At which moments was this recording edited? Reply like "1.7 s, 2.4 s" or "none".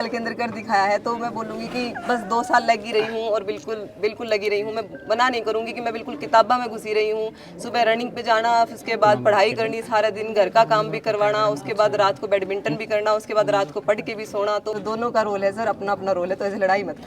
14.8 s